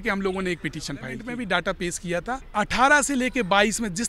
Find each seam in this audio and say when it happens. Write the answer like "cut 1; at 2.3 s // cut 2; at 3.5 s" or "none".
cut 1; at 1.2 s // cut 2; at 2.5 s